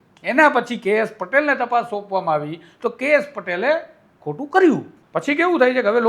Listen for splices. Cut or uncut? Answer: cut